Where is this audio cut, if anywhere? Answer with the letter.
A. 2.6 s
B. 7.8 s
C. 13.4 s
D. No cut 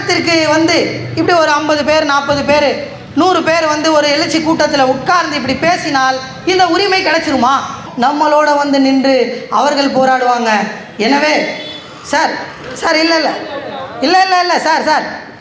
B